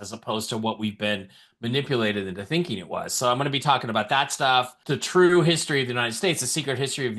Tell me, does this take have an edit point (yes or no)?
yes